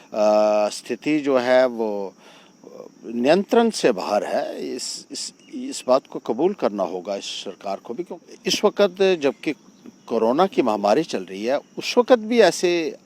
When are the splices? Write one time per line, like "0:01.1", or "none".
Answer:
0:08.1